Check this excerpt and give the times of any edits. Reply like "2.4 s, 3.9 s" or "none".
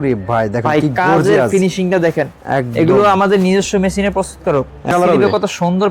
4.9 s